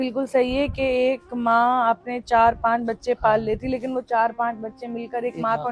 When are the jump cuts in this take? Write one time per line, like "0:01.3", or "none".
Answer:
none